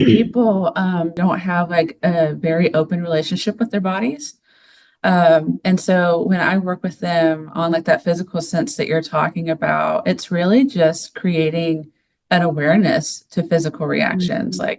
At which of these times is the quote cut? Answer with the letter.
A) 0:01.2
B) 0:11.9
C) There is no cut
A